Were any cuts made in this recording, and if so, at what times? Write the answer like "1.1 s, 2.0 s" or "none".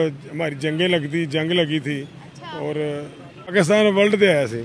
3.4 s